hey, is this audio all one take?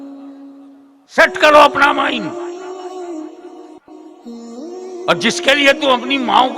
no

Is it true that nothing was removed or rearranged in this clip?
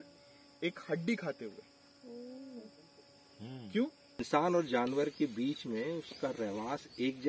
no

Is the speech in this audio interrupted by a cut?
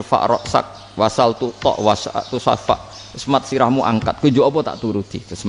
no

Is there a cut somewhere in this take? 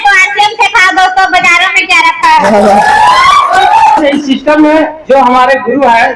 yes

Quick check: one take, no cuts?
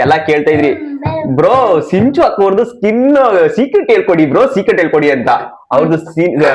yes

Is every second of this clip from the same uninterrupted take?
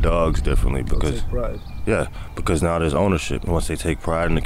no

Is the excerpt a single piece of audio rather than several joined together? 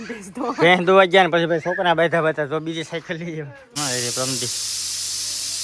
no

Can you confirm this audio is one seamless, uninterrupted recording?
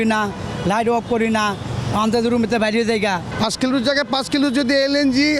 no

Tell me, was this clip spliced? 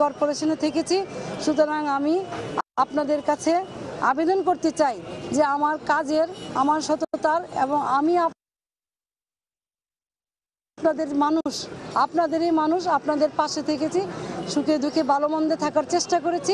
yes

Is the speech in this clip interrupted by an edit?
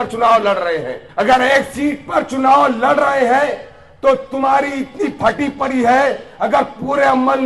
yes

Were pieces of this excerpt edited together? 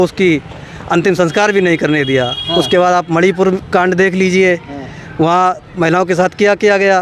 no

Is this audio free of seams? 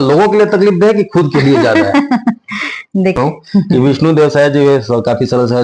no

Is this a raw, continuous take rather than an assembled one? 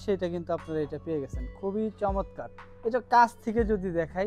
yes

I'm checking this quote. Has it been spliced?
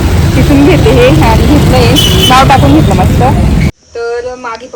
yes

